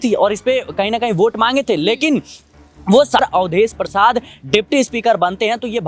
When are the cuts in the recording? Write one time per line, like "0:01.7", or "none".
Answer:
0:03.2